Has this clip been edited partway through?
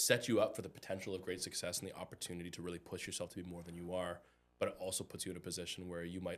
no; 0 cuts

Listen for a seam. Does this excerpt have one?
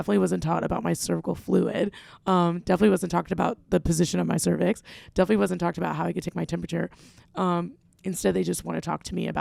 no; 0 cuts

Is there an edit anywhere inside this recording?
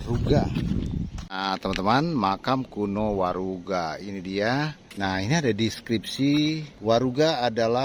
yes; 3 cuts; at 1.2 s, 4.8 s, 6.7 s

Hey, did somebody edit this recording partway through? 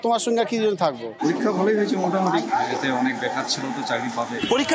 yes; 1 cut; at 1.1 s

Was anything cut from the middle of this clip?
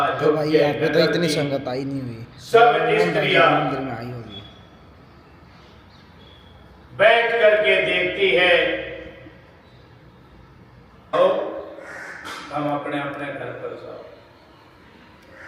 yes; 1 cut; at 11.1 s

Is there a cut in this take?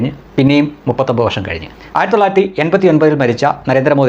yes; 1 cut; at 1.7 s

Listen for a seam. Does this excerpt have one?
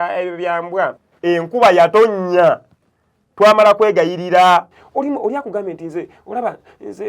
yes; 2 cuts; at 1.1 s, 4.7 s

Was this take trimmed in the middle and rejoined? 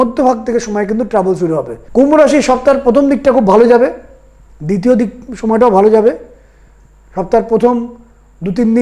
yes; 1 cut; at 1.8 s

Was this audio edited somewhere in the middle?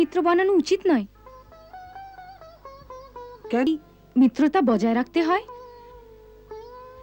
yes; 1 cut; at 3.7 s

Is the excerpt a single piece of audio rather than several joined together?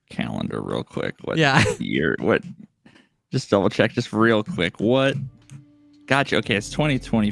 yes; 0 cuts

